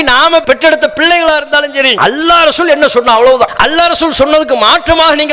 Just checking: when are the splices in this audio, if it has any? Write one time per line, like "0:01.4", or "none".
0:01.9
0:03.5